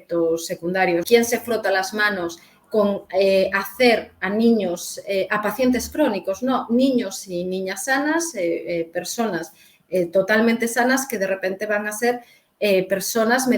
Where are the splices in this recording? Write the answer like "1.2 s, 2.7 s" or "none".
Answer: 1.0 s